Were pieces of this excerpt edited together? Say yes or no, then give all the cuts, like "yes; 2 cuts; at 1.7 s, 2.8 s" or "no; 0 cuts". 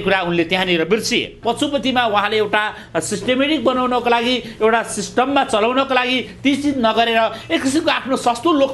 yes; 1 cut; at 1.4 s